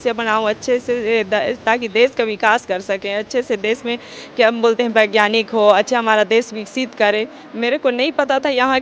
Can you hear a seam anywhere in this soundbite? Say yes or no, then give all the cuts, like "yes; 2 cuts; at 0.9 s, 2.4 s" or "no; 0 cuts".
no; 0 cuts